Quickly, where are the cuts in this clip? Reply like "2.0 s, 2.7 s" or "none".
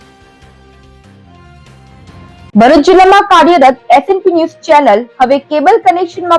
2.5 s

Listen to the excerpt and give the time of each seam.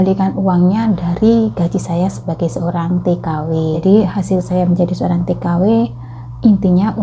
3.8 s

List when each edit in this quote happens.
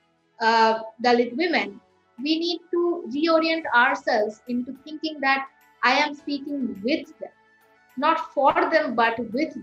2.0 s

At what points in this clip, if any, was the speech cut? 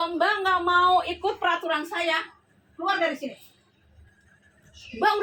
none

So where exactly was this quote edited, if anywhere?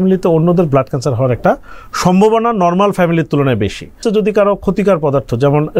4.0 s

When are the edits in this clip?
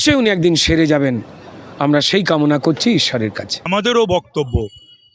3.5 s

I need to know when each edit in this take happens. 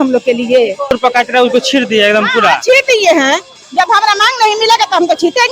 0.9 s

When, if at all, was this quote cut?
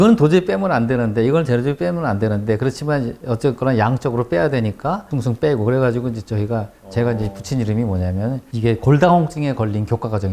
none

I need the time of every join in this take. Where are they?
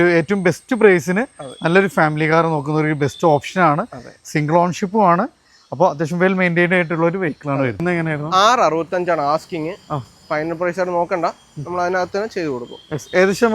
7.8 s

